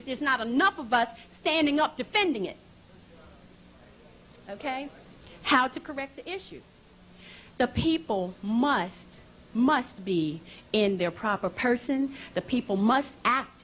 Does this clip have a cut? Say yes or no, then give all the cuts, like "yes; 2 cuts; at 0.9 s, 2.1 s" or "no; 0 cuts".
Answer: no; 0 cuts